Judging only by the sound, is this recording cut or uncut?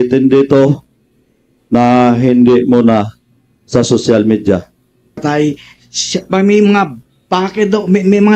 cut